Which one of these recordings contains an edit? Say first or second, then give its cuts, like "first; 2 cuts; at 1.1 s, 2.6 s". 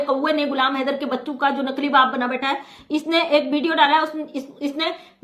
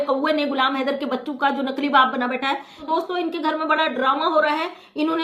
second; 1 cut; at 2.8 s